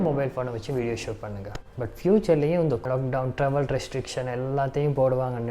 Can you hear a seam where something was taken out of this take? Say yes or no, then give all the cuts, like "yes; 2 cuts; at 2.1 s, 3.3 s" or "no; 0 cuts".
yes; 2 cuts; at 1.6 s, 2.8 s